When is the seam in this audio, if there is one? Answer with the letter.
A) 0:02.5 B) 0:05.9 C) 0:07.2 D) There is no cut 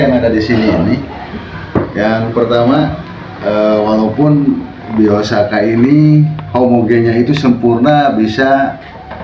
D